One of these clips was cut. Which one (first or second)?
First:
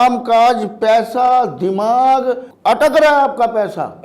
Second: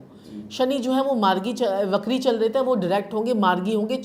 first